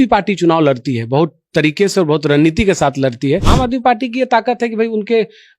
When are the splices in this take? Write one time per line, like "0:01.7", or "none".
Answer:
0:03.5